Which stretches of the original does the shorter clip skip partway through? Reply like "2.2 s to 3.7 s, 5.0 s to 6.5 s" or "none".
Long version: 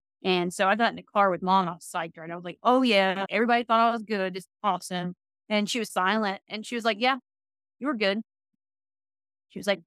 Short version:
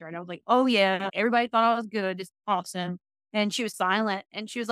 none